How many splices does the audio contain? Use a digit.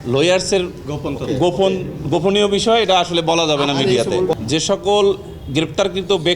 1